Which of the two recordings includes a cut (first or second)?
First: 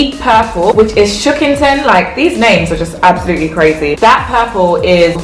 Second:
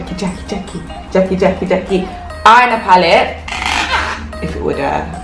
first